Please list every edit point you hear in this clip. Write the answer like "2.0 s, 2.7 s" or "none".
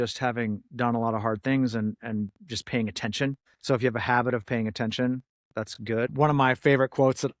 3.4 s, 6.1 s